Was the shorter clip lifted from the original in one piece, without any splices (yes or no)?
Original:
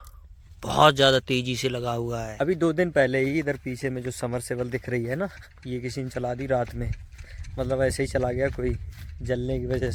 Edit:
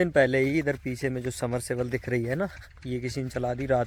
yes